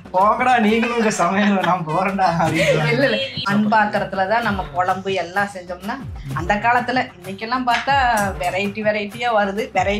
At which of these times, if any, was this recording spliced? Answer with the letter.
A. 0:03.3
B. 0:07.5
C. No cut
A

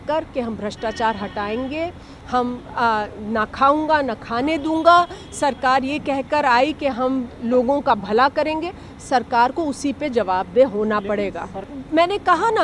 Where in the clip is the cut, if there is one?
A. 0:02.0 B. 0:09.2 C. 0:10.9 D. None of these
D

